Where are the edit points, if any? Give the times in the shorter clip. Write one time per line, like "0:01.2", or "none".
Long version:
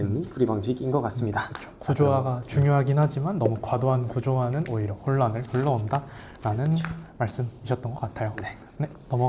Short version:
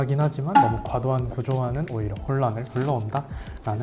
none